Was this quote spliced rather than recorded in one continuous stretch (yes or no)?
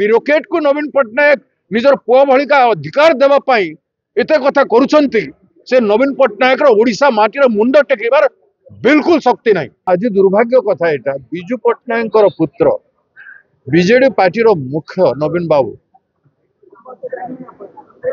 yes